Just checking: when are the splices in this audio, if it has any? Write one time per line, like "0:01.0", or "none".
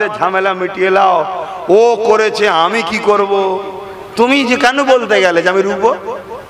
none

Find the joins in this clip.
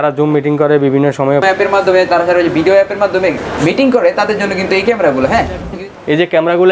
0:01.4
0:03.5
0:05.7

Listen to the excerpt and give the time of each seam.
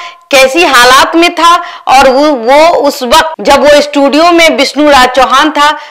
none

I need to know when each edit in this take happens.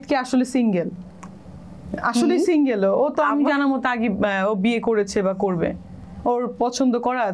none

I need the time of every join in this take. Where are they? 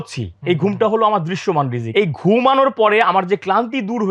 0:01.8

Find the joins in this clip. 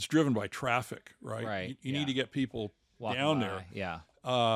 none

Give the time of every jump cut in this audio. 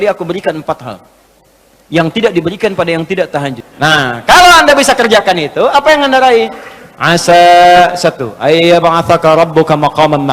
0:03.6

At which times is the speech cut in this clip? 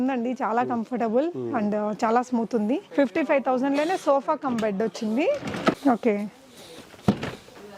0:02.9
0:05.8

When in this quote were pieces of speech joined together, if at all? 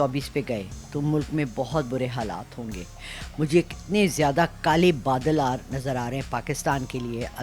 none

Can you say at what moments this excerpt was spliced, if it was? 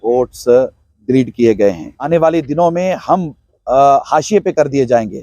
0:01.9

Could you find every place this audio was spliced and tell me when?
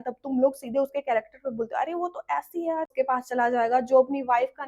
0:02.9

